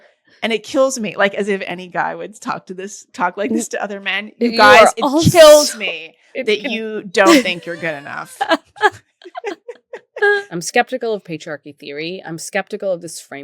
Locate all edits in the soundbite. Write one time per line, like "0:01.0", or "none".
0:10.4